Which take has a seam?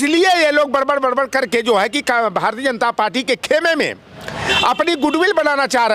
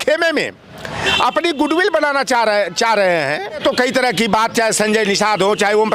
second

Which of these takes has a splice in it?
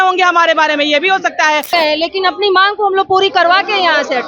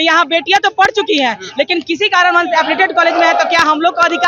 first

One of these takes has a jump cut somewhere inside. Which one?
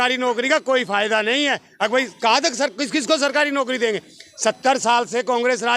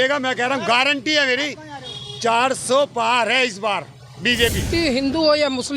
second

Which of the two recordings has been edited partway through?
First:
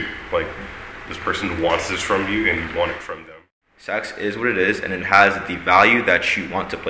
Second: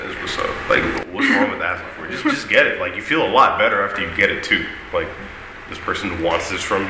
first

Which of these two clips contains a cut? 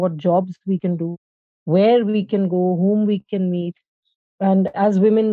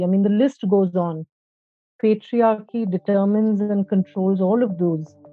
first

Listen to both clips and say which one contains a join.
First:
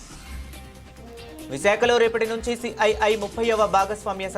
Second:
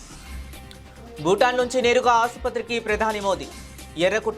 second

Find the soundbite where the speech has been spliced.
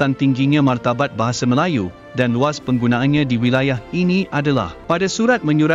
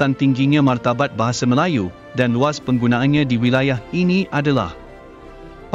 first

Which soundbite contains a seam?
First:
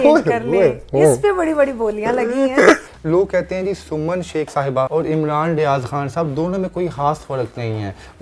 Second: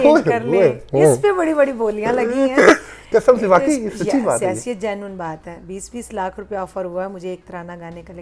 first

